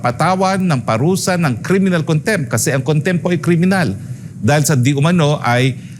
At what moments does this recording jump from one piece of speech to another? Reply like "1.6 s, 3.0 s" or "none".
none

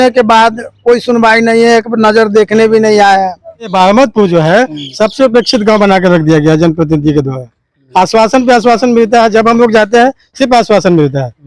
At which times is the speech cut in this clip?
3.7 s

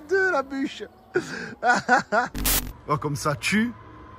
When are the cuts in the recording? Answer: 2.4 s

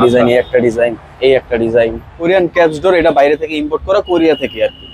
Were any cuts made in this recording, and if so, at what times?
2.2 s

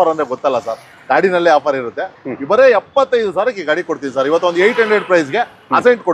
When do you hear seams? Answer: none

